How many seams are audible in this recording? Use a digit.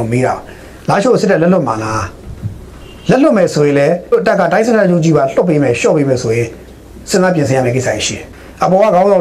1